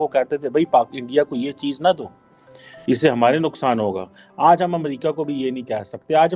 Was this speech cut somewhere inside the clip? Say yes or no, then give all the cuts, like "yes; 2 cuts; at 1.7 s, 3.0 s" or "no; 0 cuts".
no; 0 cuts